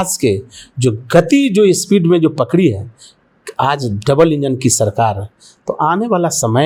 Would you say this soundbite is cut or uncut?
uncut